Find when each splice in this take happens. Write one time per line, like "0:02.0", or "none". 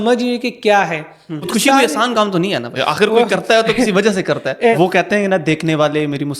0:01.5
0:02.7
0:04.8